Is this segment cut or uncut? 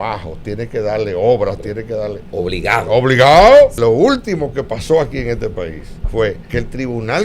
cut